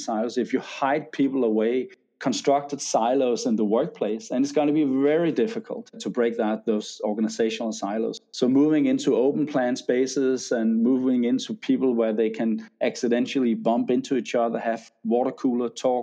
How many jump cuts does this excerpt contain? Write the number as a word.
three